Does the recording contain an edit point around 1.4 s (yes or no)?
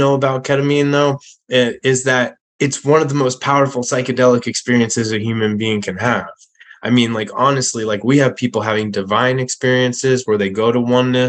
no